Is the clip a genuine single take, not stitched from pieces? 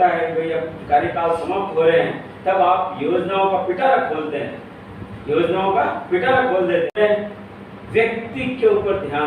no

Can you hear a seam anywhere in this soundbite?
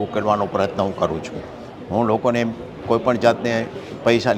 no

